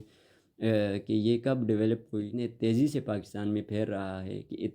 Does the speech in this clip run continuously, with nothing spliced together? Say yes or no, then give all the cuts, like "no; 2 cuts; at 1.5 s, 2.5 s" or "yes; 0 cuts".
no; 1 cut; at 2.3 s